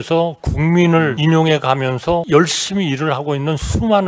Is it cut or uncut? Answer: cut